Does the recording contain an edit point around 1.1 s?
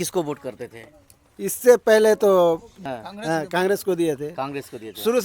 no; 1 cut; at 2.7 s

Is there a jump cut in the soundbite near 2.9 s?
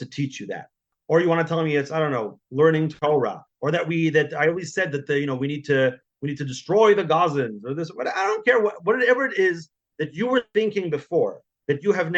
yes; 2 cuts; at 0.9 s, 2.9 s

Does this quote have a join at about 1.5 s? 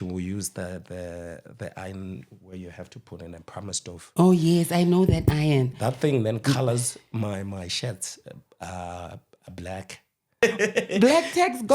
no; 1 cut; at 10.3 s

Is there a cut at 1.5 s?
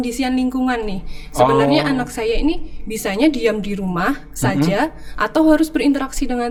no; 0 cuts

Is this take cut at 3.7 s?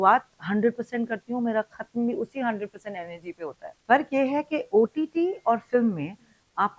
yes; 1 cut; at 3.7 s

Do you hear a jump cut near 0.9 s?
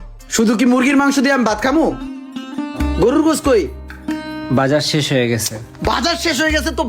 no; 0 cuts

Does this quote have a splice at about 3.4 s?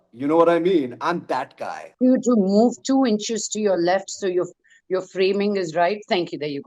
no; 1 cut; at 1.9 s

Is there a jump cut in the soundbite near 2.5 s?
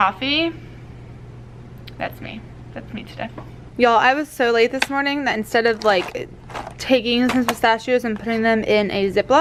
no; 0 cuts

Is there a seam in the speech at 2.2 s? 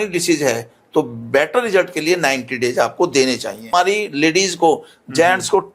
no; 1 cut; at 3.7 s

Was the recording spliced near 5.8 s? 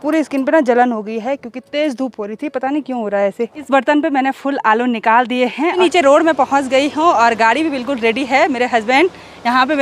yes; 2 cuts; at 3.6 s, 5.8 s

